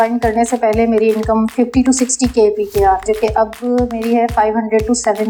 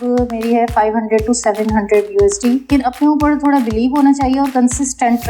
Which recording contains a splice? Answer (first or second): second